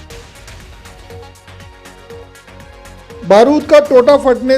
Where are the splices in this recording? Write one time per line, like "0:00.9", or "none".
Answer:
none